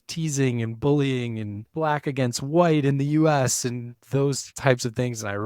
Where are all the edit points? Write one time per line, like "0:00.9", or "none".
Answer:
0:01.6
0:04.3

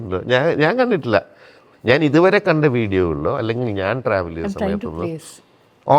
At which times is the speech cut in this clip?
none

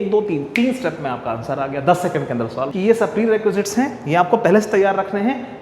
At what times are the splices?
0:02.7

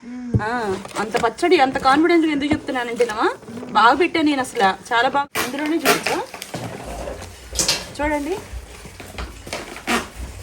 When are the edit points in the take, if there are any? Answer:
0:05.2

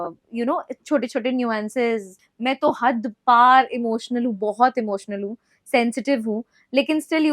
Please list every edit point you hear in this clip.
0:02.2

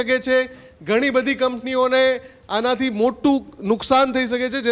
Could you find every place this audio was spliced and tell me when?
none

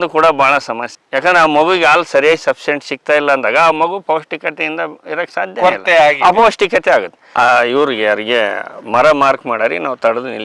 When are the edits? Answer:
0:07.2

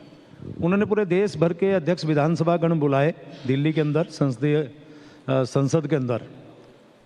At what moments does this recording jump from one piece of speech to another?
none

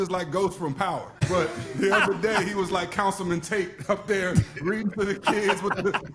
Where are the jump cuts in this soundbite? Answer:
0:01.3

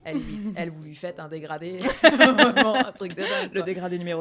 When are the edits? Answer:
none

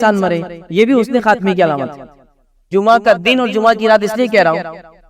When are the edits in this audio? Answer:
none

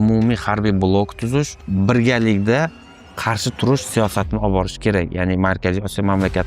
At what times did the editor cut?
0:01.6

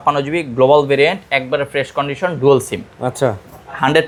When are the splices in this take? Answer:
none

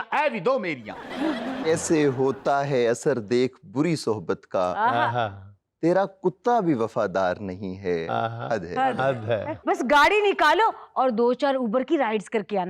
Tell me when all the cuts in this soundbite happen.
0:01.7
0:09.5

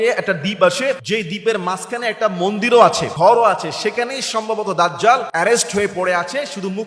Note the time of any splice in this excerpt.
0:01.0
0:03.1
0:05.3

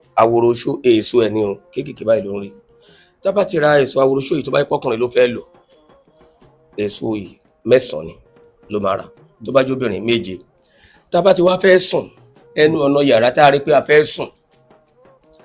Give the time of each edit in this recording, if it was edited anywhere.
none

